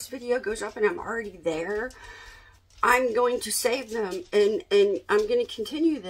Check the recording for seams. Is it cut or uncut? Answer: uncut